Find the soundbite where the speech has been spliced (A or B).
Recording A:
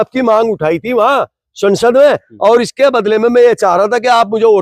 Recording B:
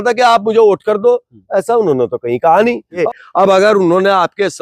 B